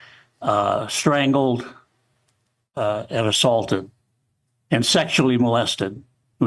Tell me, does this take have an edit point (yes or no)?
no